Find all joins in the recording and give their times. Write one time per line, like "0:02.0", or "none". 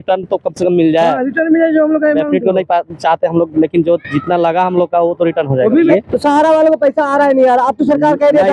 0:05.9